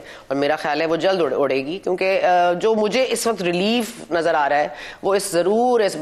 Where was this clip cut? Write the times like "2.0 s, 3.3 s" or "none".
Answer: none